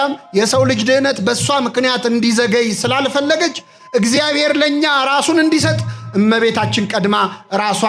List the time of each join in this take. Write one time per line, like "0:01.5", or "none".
none